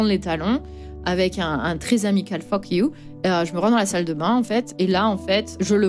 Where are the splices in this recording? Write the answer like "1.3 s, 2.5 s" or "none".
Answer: 3.1 s, 5.0 s

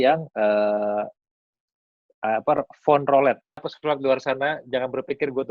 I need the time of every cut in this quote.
3.6 s

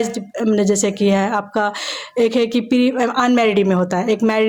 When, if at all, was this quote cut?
none

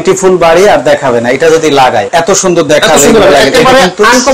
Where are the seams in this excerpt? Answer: 2.1 s

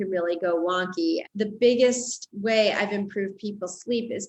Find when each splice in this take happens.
1.2 s

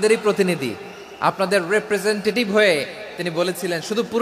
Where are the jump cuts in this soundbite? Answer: none

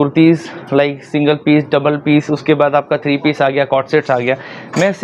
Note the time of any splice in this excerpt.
none

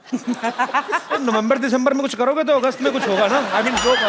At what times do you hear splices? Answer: none

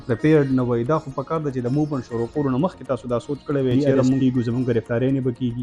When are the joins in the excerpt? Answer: 4.2 s

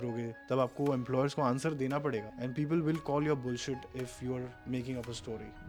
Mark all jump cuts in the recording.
none

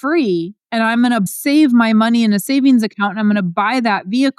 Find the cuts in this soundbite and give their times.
1.3 s

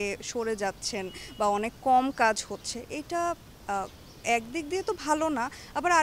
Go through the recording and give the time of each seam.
none

